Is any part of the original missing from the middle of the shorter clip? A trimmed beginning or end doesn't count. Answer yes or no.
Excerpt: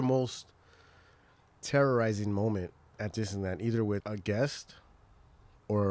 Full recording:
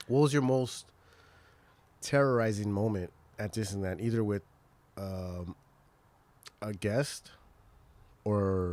yes